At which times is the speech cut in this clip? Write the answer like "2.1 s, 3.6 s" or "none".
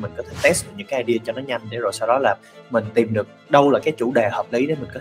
3.8 s